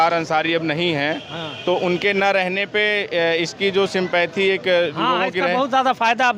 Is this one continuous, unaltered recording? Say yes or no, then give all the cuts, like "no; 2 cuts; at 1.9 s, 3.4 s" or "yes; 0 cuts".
yes; 0 cuts